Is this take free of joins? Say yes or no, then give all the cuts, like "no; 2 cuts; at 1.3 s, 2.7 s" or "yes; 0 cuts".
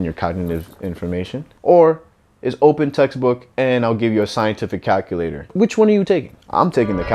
no; 2 cuts; at 1.5 s, 5.5 s